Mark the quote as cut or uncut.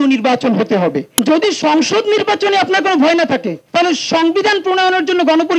cut